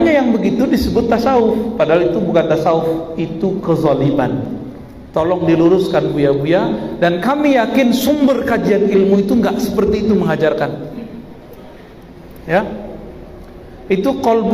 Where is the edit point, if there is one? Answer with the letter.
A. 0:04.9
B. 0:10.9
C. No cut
C